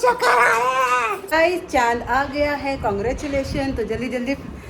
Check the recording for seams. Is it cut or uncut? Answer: cut